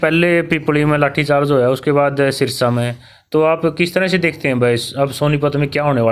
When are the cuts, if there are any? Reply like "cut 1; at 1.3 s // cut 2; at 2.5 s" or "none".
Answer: none